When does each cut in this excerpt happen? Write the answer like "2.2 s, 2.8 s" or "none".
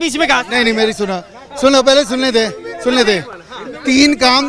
none